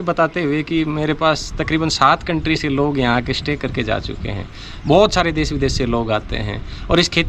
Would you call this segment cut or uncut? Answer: uncut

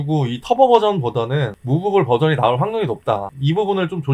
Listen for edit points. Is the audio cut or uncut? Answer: uncut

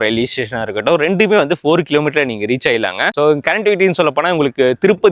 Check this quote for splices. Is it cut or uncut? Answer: uncut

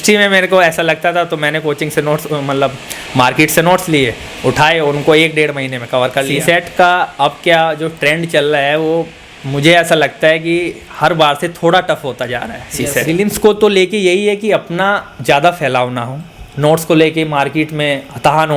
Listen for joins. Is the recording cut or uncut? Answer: cut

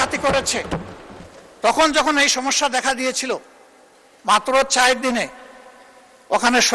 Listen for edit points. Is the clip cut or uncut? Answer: cut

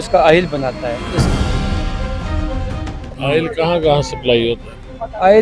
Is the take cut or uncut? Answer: cut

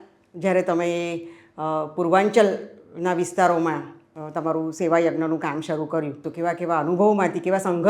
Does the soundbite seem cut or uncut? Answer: cut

